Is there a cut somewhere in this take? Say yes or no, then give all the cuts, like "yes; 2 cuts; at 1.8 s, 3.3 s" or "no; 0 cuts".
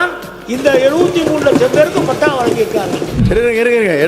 yes; 1 cut; at 3.2 s